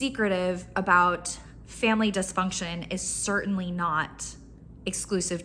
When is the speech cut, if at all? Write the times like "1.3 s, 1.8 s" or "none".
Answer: none